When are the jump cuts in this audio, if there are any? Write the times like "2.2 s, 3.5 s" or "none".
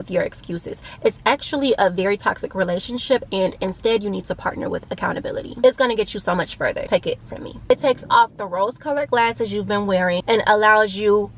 none